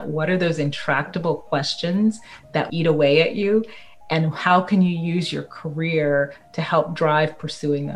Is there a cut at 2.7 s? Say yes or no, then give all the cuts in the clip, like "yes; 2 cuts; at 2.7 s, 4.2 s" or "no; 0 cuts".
yes; 1 cut; at 2.7 s